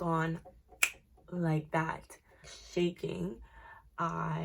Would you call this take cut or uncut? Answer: uncut